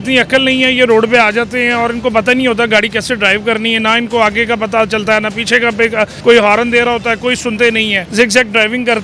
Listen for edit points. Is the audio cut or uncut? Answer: cut